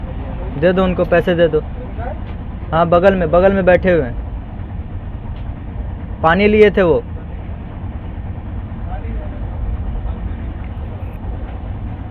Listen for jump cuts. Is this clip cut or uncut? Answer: uncut